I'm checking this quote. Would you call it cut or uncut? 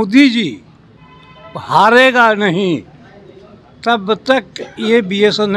uncut